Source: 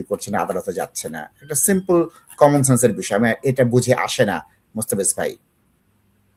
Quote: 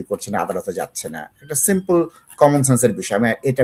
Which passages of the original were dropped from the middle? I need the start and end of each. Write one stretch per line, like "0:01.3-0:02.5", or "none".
none